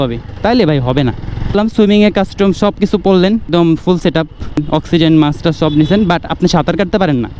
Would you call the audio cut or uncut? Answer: cut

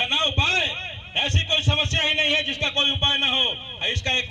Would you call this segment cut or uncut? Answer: uncut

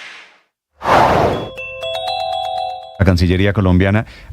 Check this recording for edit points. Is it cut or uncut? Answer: cut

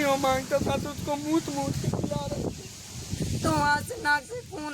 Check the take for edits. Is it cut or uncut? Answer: cut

